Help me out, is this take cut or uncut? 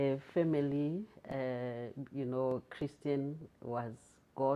uncut